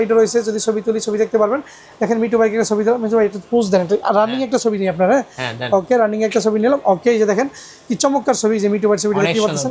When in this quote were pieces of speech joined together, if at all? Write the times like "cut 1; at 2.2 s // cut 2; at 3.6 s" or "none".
none